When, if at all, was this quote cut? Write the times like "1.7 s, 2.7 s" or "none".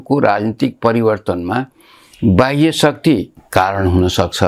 3.4 s